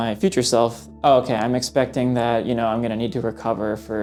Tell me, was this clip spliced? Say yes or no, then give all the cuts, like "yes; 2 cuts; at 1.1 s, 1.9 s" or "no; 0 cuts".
no; 0 cuts